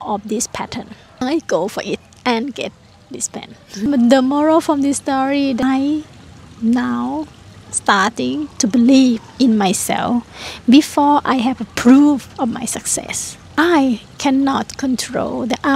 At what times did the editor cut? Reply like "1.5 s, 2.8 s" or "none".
1.2 s, 3.9 s, 5.6 s